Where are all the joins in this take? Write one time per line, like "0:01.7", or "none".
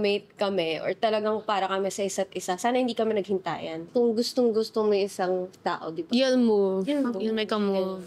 none